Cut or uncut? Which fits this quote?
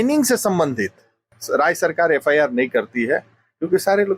cut